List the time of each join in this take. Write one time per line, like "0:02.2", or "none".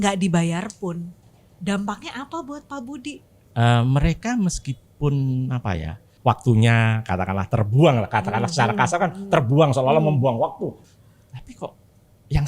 0:03.3
0:06.0
0:10.8